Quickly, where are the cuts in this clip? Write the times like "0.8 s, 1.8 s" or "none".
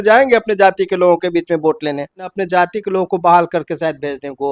2.4 s